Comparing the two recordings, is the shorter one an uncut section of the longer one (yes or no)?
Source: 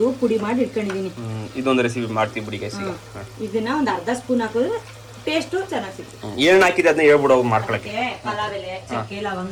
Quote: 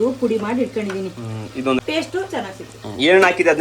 no